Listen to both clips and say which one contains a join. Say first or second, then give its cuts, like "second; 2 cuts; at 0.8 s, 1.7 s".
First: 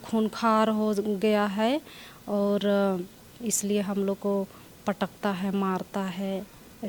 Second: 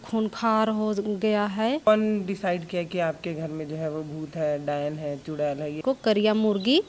second; 2 cuts; at 1.9 s, 5.8 s